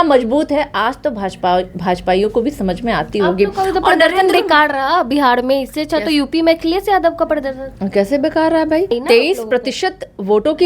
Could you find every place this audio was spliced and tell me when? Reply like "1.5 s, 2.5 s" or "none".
9.0 s